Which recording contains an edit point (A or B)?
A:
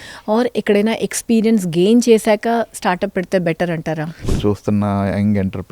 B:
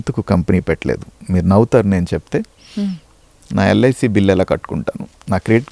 A